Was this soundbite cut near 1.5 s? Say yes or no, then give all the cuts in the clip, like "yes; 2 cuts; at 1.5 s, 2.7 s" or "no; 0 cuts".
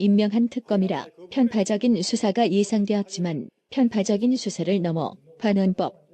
yes; 1 cut; at 1.5 s